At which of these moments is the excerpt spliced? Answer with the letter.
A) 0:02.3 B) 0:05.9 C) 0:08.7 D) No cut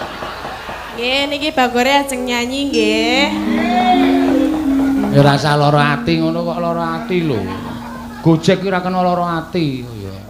D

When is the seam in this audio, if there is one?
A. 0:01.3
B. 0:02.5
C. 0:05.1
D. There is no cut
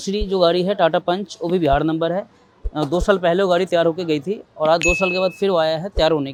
D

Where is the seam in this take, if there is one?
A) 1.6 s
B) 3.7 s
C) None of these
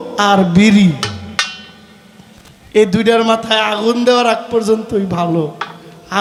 C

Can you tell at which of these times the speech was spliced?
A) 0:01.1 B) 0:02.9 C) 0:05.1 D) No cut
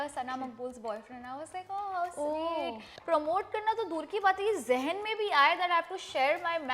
B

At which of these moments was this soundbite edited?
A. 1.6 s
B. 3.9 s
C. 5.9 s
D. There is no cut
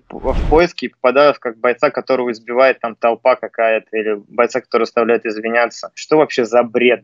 C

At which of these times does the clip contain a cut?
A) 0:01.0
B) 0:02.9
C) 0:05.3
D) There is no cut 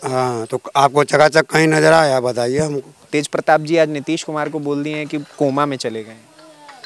B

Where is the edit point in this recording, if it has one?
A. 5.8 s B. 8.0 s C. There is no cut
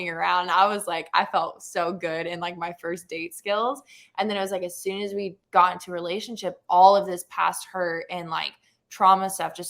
C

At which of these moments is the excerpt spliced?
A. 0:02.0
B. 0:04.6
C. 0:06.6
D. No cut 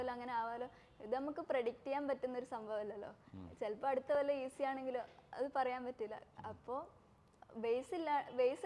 D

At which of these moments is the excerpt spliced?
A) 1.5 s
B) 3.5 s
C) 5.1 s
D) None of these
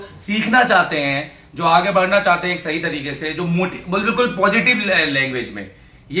D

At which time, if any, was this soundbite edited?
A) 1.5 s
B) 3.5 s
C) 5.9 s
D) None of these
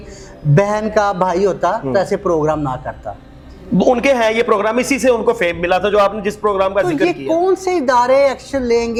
D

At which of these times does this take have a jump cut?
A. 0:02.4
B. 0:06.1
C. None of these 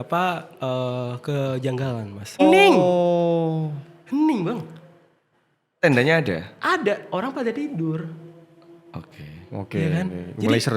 A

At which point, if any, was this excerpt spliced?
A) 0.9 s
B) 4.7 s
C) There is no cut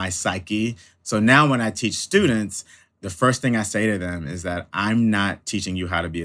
A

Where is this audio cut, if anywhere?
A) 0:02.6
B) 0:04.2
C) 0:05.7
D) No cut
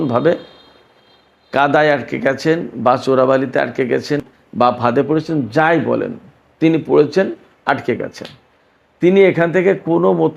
B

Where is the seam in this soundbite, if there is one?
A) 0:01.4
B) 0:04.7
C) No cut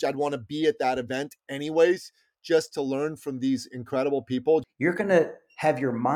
B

